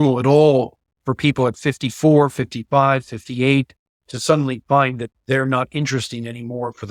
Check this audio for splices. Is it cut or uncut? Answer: uncut